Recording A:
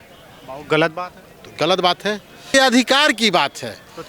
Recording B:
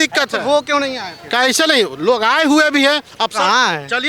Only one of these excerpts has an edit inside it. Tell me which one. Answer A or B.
A